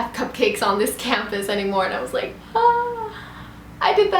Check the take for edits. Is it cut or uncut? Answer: uncut